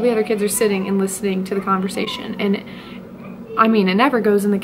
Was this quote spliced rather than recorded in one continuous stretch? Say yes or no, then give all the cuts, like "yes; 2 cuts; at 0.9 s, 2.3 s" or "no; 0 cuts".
no; 0 cuts